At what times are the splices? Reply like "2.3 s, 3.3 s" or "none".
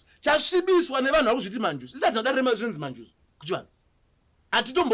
none